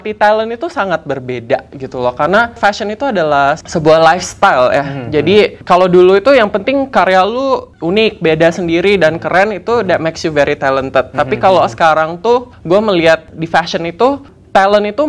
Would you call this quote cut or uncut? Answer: uncut